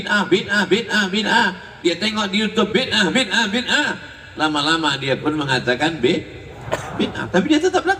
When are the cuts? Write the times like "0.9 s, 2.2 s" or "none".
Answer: none